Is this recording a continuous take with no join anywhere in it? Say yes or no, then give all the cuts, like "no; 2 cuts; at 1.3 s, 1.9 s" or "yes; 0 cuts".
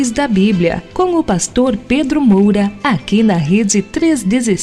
no; 1 cut; at 2.7 s